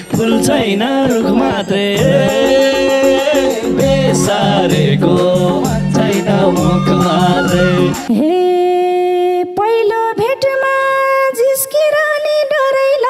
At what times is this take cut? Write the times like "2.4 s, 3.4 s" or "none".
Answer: 8.0 s